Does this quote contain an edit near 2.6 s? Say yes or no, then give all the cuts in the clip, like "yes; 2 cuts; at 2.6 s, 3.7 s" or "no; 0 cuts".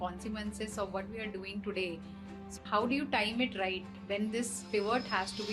yes; 1 cut; at 2.6 s